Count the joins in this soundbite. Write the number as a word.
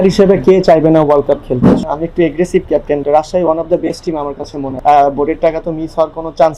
three